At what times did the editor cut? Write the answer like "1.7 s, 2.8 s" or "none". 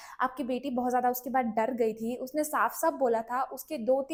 none